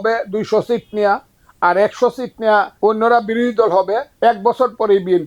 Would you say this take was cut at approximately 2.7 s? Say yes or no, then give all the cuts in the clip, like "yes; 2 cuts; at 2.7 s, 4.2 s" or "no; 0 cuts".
yes; 2 cuts; at 2.7 s, 4.1 s